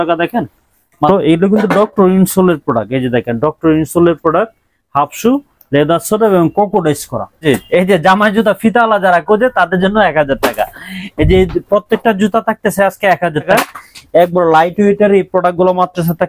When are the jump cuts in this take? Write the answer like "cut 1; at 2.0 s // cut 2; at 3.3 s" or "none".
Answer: cut 1; at 1.1 s // cut 2; at 7.4 s // cut 3; at 13.5 s